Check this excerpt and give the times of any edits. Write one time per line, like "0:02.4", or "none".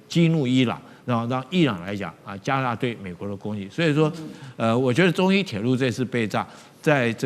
none